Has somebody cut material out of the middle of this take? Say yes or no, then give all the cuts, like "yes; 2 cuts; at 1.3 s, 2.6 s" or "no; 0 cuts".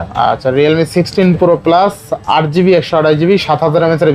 no; 0 cuts